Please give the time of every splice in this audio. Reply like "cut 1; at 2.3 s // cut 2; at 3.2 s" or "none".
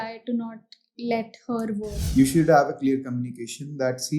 cut 1; at 2.0 s